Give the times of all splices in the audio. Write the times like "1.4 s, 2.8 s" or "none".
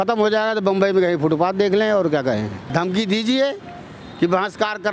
2.6 s